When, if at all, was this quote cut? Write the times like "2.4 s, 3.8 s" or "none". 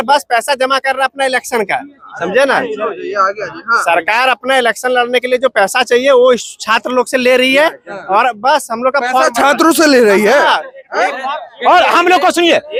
none